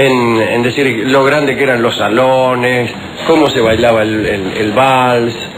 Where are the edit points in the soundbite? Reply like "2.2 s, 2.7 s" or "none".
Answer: 2.6 s